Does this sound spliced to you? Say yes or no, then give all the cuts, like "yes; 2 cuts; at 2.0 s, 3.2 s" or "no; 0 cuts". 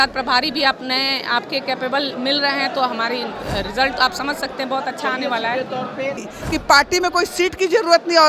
yes; 1 cut; at 6.3 s